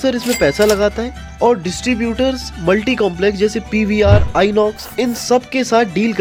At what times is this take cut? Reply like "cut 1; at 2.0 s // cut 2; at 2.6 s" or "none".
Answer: none